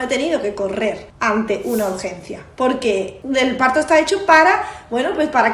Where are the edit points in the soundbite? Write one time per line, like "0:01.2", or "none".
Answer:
0:01.1
0:03.2